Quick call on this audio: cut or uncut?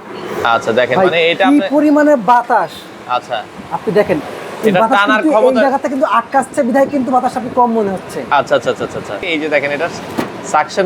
cut